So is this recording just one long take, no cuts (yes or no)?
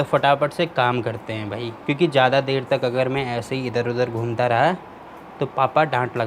yes